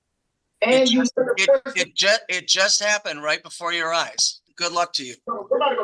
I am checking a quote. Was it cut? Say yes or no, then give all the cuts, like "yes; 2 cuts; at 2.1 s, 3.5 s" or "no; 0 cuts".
yes; 1 cut; at 4.4 s